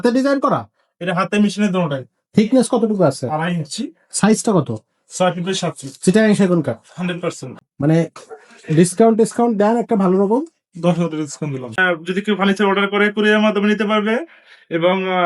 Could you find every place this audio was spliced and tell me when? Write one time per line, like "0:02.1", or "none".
0:07.4
0:11.8